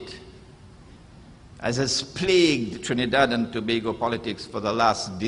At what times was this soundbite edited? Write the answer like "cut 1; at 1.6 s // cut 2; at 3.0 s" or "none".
none